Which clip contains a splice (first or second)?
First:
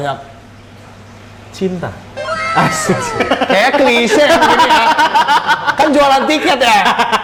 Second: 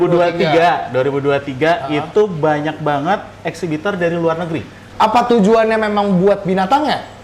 second